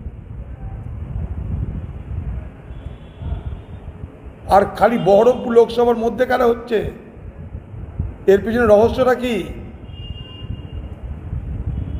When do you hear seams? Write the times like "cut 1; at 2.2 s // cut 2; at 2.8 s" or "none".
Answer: none